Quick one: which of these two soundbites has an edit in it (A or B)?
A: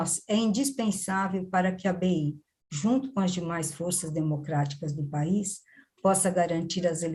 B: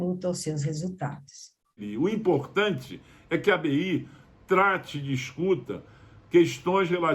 B